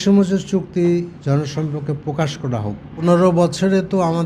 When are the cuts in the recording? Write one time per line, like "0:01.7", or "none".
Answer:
0:02.9